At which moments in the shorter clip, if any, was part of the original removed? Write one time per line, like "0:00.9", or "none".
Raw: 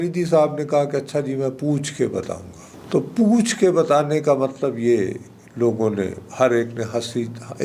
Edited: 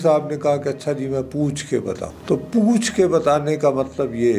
0:02.1